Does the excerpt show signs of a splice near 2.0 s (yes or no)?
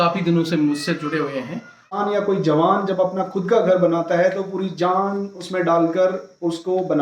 yes